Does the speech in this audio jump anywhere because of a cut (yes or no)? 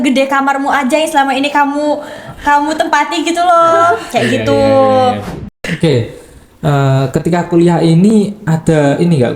yes